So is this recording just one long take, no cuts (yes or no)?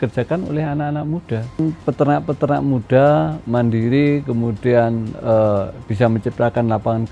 no